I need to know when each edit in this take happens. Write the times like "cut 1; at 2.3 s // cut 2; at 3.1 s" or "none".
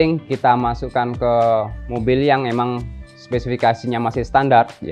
none